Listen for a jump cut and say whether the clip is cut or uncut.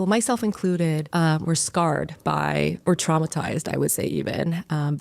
cut